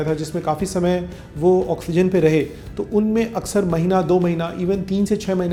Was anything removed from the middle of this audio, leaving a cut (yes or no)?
no